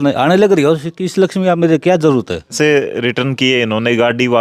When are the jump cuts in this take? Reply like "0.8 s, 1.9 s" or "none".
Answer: 2.5 s